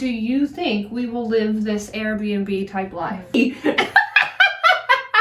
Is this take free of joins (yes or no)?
no